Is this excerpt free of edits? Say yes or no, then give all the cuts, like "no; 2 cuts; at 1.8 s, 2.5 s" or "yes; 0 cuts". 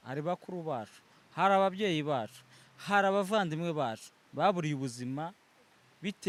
yes; 0 cuts